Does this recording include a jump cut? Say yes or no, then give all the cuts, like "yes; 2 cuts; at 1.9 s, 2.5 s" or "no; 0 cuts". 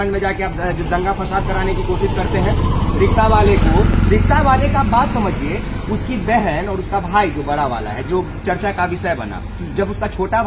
no; 0 cuts